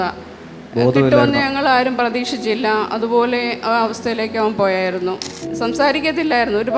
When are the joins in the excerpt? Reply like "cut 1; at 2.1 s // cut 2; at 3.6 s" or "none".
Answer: cut 1; at 5.3 s